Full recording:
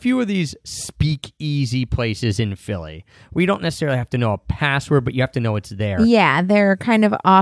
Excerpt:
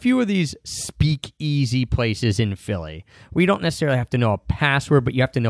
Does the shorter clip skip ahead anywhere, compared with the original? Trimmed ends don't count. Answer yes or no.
no